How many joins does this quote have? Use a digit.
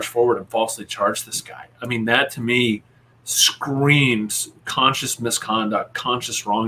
0